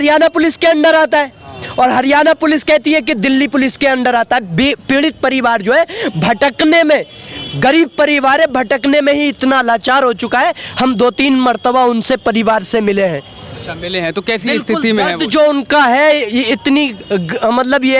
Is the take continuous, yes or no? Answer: yes